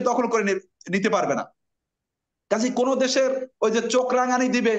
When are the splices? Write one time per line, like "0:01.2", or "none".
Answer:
none